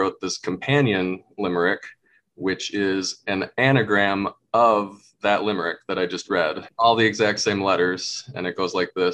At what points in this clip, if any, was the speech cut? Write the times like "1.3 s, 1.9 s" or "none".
6.6 s